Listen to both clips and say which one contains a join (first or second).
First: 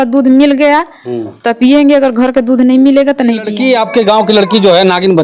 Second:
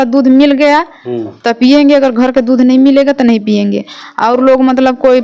first